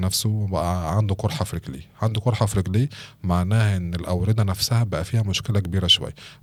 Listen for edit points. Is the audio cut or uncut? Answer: uncut